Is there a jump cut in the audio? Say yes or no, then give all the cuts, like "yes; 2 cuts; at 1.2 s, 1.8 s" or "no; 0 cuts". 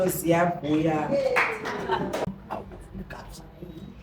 yes; 1 cut; at 2.3 s